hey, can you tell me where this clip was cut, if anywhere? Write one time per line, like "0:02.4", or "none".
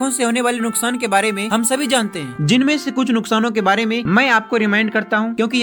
none